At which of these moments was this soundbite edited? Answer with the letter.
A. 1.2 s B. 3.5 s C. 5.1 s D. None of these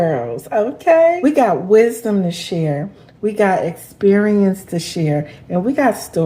A